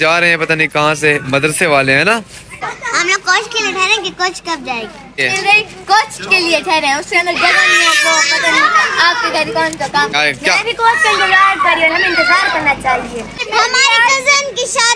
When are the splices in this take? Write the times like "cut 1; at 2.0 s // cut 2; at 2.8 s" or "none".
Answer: cut 1; at 2.6 s // cut 2; at 5.1 s // cut 3; at 10.1 s // cut 4; at 13.4 s